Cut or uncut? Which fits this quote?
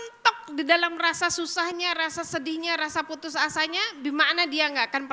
uncut